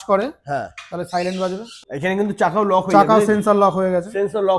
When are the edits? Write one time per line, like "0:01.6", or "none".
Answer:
0:01.8